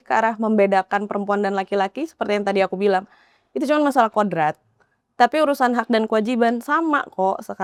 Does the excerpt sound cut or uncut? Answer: uncut